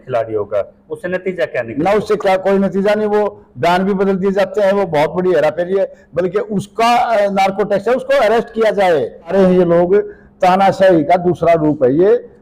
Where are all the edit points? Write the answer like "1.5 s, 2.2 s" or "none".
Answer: 9.3 s